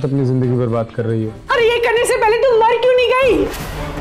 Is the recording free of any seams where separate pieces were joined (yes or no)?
no